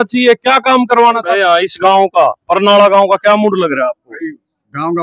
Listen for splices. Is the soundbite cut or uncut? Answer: cut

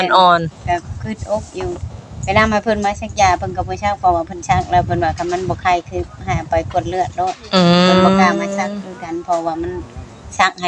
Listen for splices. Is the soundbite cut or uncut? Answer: uncut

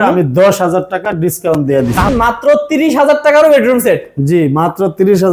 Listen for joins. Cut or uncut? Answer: cut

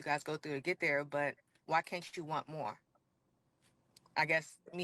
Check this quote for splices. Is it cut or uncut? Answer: cut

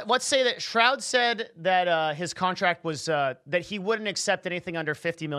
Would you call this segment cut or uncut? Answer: uncut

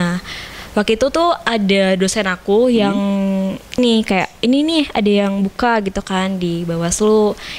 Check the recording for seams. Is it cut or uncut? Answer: cut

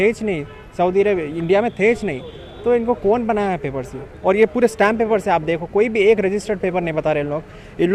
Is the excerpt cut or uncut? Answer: uncut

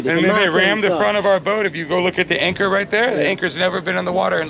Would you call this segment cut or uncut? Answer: uncut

